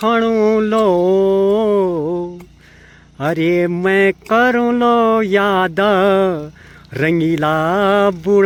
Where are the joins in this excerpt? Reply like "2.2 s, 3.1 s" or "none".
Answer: none